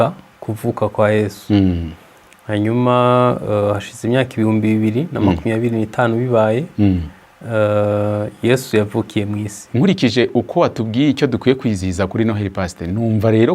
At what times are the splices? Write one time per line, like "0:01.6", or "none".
0:09.6